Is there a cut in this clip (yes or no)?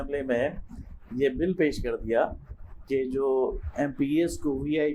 no